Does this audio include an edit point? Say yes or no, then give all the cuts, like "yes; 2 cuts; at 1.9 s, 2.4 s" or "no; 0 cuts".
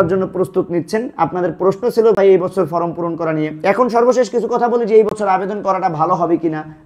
no; 0 cuts